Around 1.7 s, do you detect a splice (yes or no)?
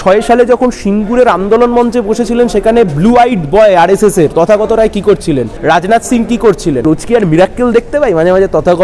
no